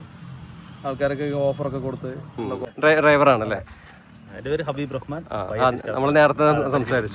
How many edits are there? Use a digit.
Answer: 1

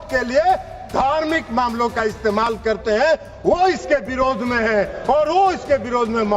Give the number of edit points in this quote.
0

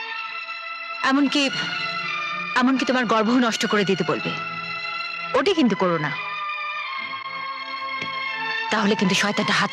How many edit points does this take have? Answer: 0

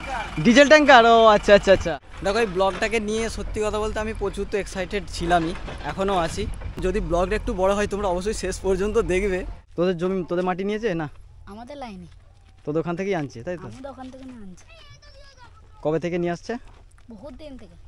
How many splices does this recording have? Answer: 3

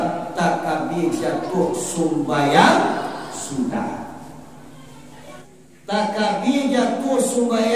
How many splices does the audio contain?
1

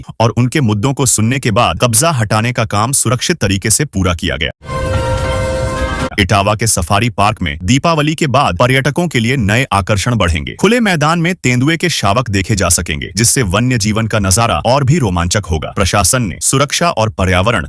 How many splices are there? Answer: 3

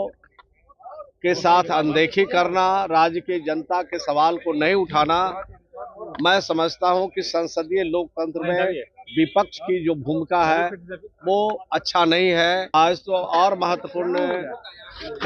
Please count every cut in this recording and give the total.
1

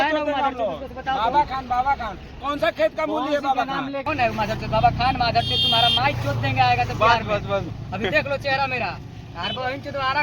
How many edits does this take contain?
1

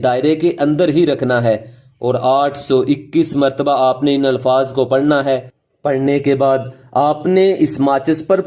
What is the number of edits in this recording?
0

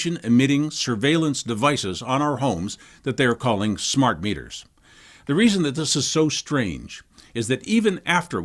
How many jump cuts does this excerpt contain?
1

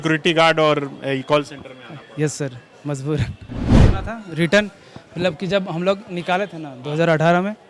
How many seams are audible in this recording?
1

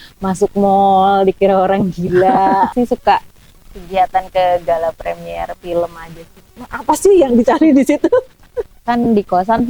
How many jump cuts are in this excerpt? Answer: 2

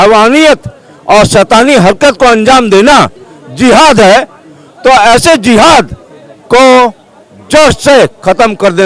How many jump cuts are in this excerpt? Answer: 0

